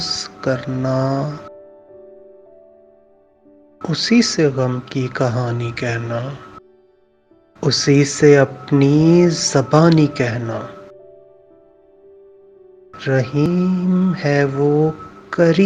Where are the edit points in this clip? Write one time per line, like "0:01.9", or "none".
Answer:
none